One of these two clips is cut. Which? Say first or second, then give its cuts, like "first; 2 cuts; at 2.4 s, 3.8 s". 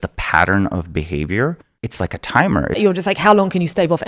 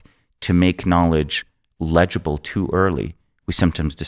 first; 2 cuts; at 1.7 s, 2.8 s